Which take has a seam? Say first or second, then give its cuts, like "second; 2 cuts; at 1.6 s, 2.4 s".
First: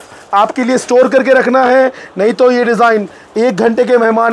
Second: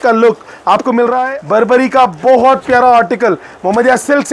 second; 1 cut; at 1.2 s